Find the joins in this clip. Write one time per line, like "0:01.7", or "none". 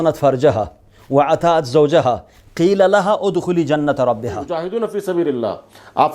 0:04.5